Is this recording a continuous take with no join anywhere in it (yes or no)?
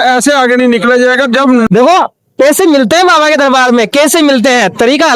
no